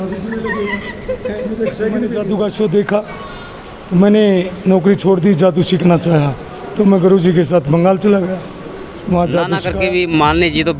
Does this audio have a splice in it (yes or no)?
yes